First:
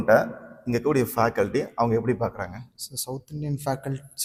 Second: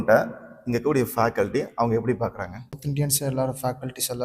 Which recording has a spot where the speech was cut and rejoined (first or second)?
second